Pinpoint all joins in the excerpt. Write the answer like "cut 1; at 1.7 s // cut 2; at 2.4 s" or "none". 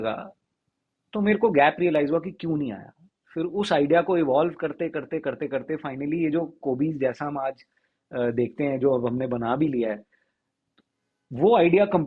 none